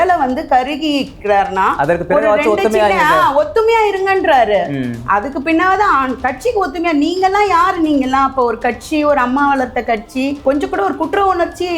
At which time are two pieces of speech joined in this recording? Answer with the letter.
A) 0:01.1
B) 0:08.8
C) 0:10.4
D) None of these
C